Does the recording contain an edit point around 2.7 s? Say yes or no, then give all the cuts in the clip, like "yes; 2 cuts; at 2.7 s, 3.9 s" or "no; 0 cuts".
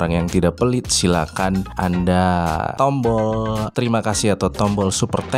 yes; 3 cuts; at 1.7 s, 2.7 s, 3.7 s